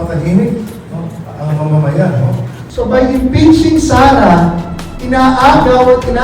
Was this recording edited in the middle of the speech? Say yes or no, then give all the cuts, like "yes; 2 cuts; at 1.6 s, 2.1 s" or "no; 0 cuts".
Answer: yes; 1 cut; at 2.7 s